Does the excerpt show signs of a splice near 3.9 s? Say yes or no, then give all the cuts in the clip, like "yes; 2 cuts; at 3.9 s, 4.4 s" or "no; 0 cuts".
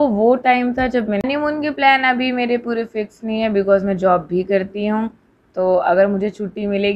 no; 1 cut; at 1.2 s